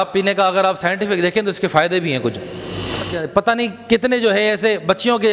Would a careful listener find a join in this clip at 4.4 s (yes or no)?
no